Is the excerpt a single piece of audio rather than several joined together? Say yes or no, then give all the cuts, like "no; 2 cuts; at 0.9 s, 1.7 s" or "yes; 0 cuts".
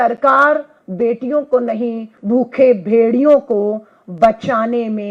yes; 0 cuts